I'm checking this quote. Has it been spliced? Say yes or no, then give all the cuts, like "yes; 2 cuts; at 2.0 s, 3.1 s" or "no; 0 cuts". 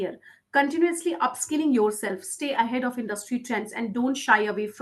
no; 0 cuts